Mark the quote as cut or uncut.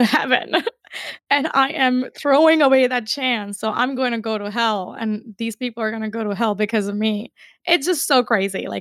uncut